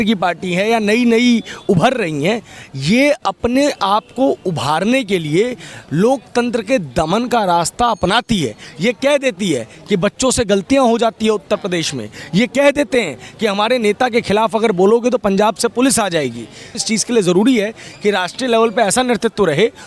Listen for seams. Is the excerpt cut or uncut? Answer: cut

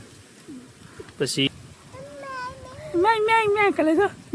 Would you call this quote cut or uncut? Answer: cut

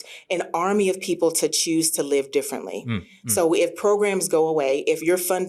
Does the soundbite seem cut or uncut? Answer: uncut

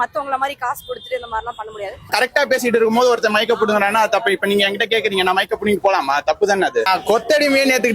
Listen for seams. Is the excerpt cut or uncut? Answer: cut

